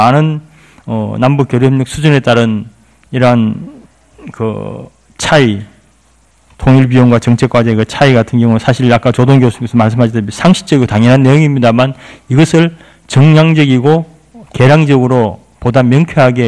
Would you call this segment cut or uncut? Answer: cut